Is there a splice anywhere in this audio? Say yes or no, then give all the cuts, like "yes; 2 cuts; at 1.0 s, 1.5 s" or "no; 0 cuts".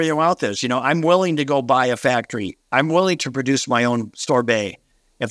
no; 0 cuts